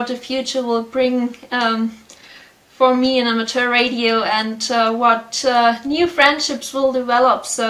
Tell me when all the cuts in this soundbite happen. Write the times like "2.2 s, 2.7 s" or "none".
none